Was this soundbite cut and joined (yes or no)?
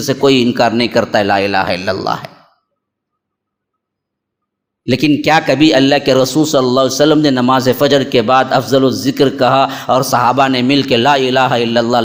no